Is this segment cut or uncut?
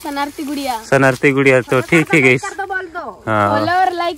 uncut